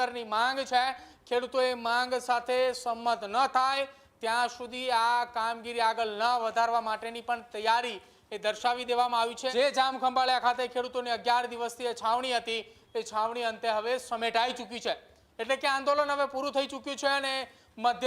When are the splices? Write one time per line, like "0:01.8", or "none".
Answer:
0:09.4